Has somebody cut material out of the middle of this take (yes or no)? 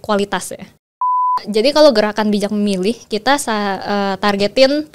yes